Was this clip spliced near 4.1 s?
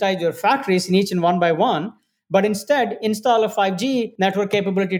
yes; 1 cut; at 4.1 s

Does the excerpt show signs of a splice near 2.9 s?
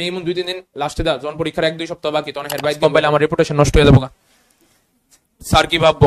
yes; 1 cut; at 2.9 s

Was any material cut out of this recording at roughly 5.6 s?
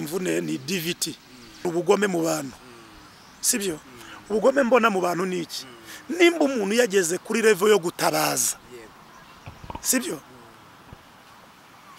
no; 1 cut; at 1.6 s

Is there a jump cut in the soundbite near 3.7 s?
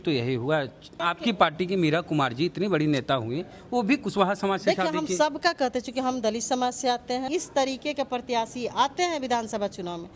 no; 2 cuts; at 1.0 s, 7.3 s

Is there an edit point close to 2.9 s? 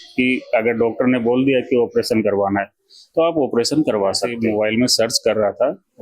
no; 1 cut; at 4.3 s

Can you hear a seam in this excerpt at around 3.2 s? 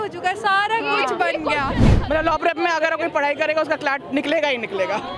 no; 1 cut; at 1.9 s

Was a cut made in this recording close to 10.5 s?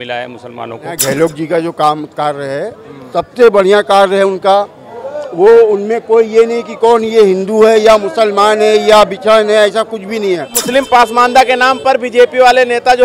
yes; 2 cuts; at 1.0 s, 10.5 s

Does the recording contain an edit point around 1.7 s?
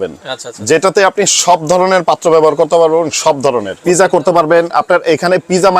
no; 1 cut; at 3.7 s

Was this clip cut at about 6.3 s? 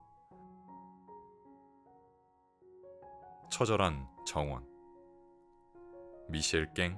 yes; 3 cuts; at 3.6 s, 4.6 s, 6.3 s

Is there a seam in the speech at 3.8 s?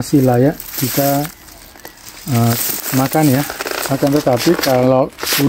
yes; 1 cut; at 3.8 s

